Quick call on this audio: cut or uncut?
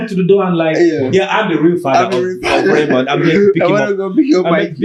uncut